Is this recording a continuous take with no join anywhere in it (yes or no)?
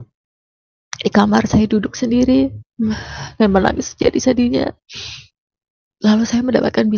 yes